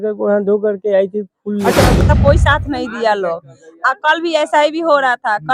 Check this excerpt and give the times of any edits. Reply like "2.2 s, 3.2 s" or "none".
2.0 s